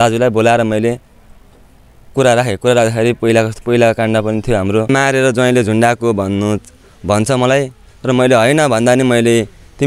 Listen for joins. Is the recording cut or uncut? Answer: cut